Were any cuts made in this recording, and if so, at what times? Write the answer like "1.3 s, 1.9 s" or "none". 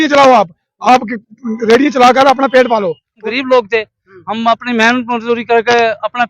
3.2 s